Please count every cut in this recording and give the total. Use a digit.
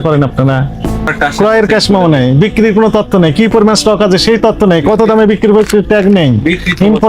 1